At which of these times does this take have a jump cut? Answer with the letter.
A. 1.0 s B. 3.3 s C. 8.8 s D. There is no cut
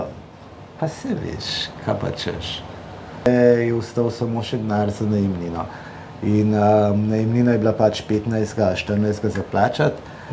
B